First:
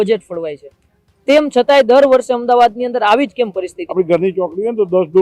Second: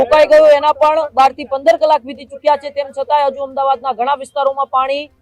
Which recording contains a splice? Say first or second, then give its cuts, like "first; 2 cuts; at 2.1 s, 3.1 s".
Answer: first; 1 cut; at 3.8 s